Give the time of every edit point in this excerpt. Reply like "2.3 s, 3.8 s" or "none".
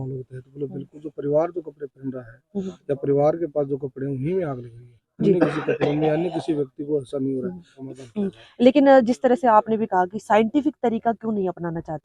7.8 s

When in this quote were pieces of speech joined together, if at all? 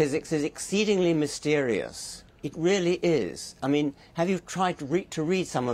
none

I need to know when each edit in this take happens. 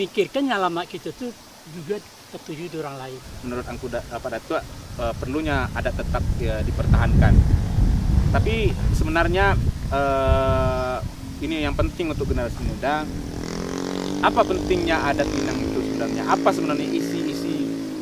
none

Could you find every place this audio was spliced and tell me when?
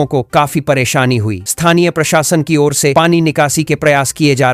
none

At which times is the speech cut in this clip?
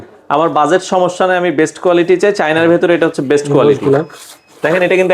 none

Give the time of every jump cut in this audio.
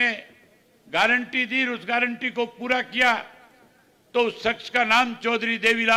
none

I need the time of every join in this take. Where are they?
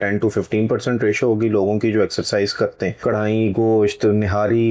2.9 s

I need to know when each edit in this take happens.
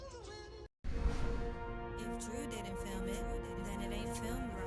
0.9 s

